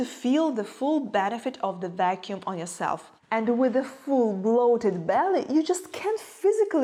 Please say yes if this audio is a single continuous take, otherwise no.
yes